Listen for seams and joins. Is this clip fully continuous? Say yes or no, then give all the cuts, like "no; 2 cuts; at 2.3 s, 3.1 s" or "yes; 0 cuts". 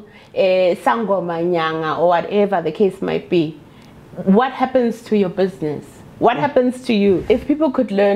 no; 1 cut; at 7.2 s